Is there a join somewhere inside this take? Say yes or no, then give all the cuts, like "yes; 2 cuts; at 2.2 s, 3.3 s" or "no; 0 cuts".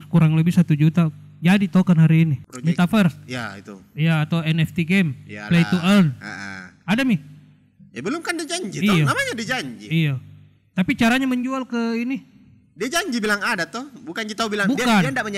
yes; 1 cut; at 2.4 s